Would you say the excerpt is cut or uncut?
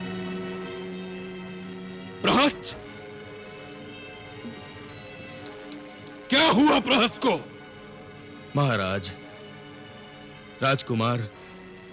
uncut